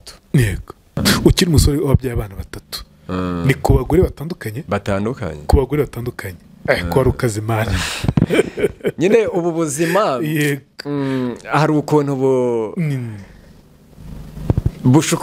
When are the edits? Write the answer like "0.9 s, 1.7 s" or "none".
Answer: 1.0 s